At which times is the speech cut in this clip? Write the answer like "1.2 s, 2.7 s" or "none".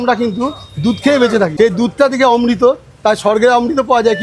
1.5 s